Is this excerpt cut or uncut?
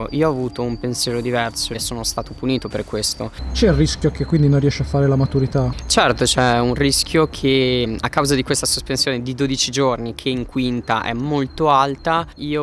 cut